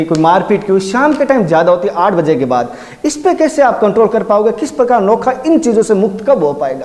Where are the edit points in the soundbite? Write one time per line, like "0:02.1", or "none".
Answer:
none